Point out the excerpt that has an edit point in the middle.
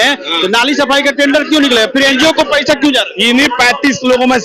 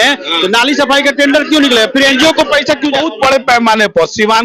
second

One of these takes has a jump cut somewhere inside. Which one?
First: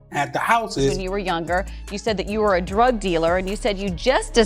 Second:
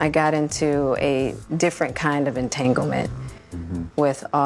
first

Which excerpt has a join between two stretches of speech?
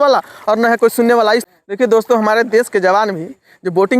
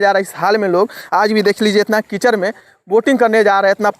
first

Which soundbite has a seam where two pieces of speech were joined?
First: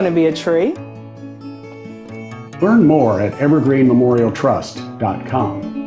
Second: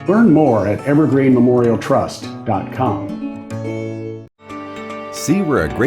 second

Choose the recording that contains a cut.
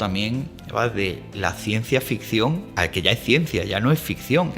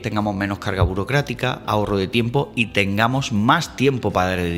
first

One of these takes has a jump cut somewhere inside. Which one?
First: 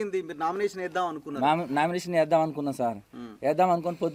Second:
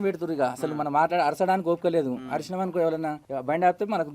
second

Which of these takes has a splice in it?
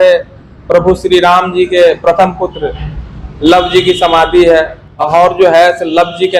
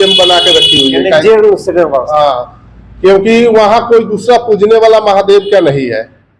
first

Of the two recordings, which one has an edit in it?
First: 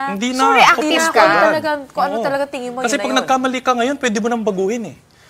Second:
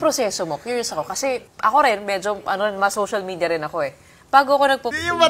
second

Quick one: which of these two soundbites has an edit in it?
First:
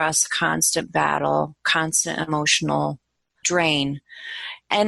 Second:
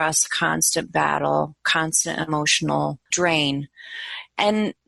second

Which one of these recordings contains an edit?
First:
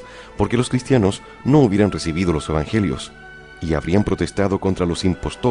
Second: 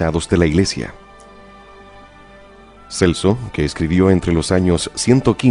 first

